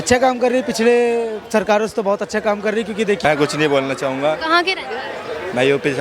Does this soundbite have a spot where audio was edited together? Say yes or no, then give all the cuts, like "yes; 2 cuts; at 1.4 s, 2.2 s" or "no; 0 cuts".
yes; 1 cut; at 3.2 s